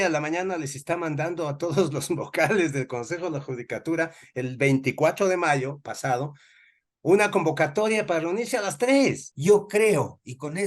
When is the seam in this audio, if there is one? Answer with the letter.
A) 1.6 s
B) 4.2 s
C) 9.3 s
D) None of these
C